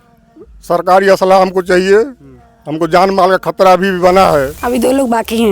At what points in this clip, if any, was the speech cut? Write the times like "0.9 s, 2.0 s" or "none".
4.6 s